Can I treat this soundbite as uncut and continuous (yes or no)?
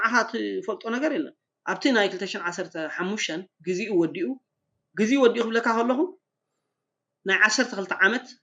no